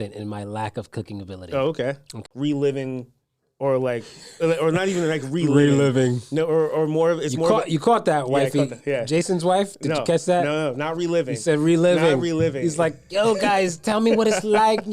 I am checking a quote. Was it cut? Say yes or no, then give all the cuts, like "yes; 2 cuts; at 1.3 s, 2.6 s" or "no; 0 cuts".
yes; 1 cut; at 2.2 s